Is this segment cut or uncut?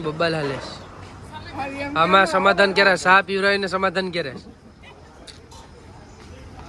uncut